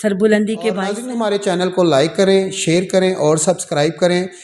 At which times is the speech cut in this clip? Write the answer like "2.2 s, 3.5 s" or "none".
1.0 s